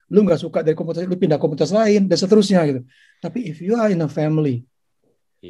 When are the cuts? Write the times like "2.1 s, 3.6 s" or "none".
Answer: none